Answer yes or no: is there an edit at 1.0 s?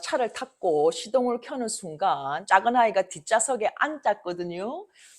no